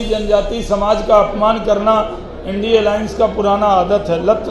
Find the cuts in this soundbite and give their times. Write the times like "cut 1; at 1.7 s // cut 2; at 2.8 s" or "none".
none